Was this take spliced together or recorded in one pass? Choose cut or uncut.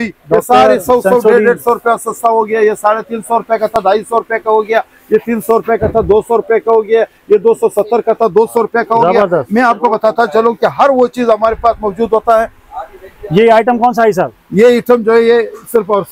uncut